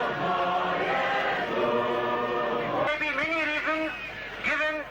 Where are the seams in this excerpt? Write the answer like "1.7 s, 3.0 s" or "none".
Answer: 2.9 s